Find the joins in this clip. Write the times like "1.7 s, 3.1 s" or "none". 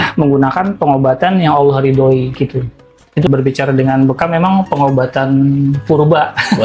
3.3 s